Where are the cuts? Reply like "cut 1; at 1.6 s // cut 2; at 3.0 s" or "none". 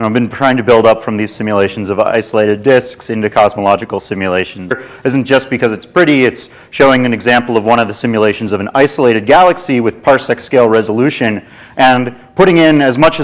none